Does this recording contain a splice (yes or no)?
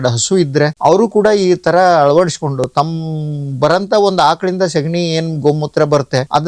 no